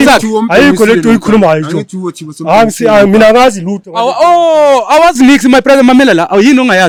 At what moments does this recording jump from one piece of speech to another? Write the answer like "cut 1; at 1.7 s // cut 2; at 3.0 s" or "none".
none